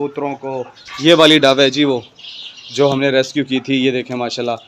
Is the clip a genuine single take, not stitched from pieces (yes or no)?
yes